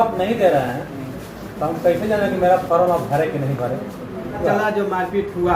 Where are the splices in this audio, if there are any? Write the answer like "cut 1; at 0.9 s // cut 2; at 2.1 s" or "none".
cut 1; at 4.4 s